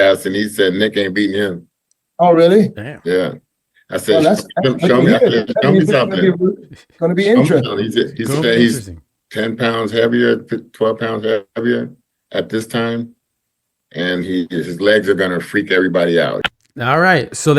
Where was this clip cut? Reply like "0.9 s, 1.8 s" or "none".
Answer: 16.5 s